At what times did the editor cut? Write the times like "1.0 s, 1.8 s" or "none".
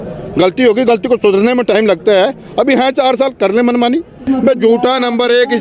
4.2 s